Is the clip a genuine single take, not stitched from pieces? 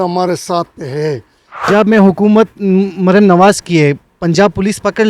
no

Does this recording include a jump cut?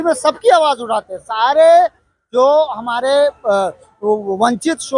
no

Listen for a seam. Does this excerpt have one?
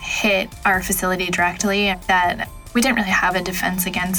no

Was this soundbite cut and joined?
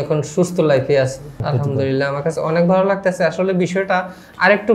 yes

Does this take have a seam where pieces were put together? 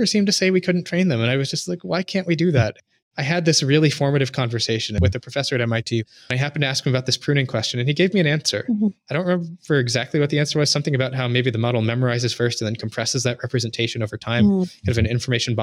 yes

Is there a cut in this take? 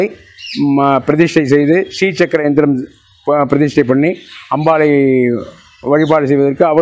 no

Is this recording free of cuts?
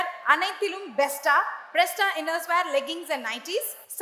yes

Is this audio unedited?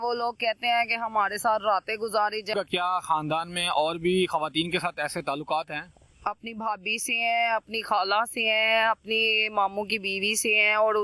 no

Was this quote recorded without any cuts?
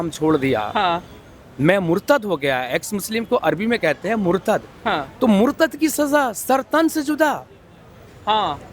yes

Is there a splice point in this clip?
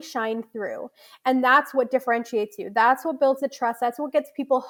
no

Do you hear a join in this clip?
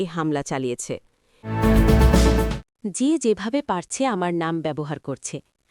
yes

